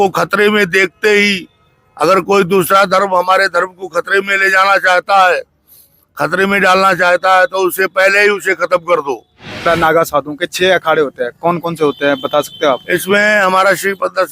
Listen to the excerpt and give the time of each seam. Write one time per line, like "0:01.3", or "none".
0:09.6